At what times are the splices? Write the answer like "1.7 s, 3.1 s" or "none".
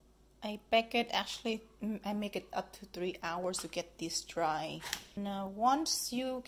5.2 s